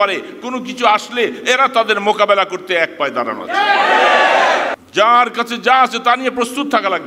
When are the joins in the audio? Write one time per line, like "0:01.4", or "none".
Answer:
0:04.8